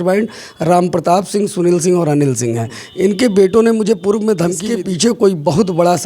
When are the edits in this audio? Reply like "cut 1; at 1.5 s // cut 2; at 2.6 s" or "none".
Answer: cut 1; at 4.6 s